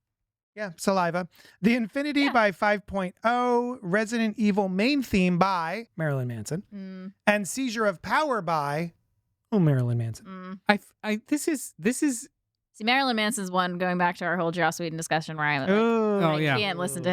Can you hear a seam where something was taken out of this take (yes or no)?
yes